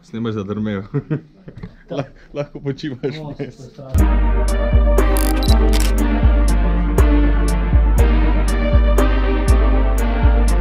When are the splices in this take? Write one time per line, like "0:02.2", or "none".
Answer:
none